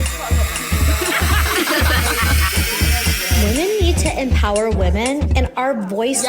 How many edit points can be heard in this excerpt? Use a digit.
0